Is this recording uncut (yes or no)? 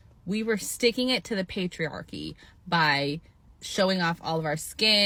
yes